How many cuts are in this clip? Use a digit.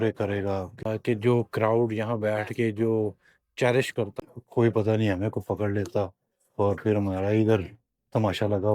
2